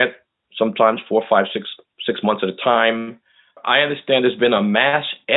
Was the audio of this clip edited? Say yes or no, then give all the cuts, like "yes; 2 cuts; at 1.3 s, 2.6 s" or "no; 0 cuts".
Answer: yes; 1 cut; at 3.6 s